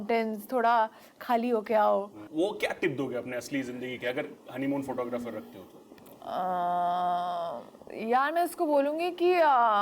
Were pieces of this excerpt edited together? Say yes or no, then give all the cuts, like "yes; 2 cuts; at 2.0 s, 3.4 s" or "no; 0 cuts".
yes; 1 cut; at 2.2 s